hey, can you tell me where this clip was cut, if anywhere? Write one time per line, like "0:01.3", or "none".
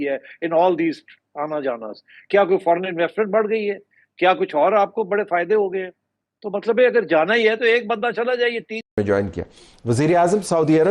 0:08.8